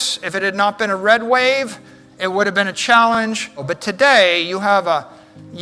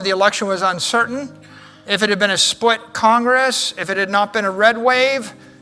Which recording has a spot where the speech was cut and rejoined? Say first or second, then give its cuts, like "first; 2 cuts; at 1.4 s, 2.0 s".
first; 1 cut; at 3.7 s